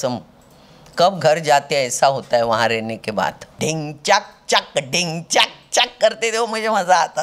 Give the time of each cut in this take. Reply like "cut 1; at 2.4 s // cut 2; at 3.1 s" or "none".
cut 1; at 3.5 s